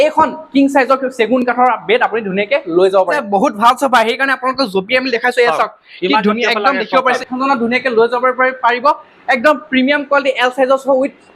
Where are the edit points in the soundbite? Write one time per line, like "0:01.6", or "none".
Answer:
0:03.2
0:07.2